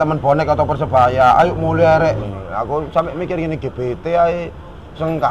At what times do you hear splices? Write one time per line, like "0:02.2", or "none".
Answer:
0:02.2